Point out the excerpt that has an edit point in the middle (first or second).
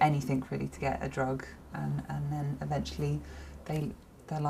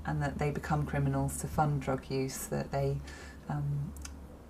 second